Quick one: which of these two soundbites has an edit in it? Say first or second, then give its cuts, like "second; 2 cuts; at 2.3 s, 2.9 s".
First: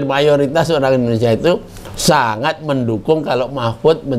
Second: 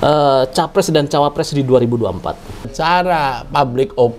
second; 1 cut; at 2.7 s